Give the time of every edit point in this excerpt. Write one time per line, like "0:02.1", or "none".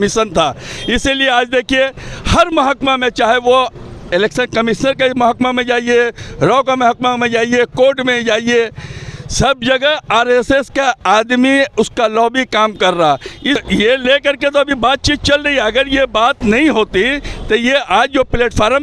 0:13.6